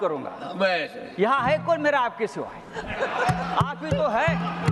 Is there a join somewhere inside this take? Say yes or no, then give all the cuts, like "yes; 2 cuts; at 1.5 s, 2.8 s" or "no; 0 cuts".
no; 0 cuts